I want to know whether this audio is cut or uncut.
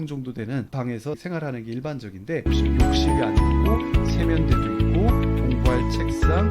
cut